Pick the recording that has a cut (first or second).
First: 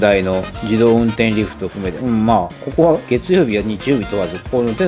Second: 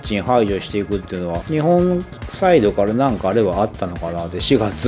first